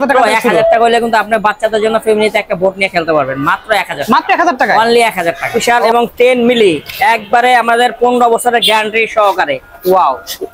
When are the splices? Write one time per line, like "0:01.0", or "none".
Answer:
0:05.5